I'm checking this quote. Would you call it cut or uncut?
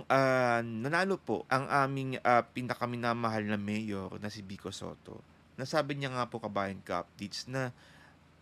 cut